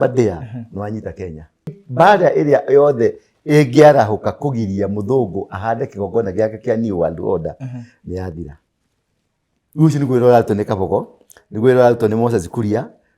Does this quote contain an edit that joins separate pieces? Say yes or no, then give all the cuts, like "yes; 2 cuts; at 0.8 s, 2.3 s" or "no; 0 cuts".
yes; 1 cut; at 1.8 s